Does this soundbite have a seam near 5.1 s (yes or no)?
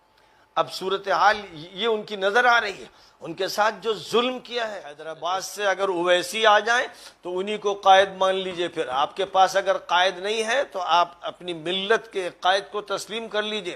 yes